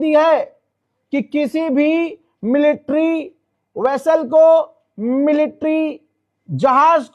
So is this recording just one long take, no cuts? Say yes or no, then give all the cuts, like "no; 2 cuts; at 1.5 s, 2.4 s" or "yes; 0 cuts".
yes; 0 cuts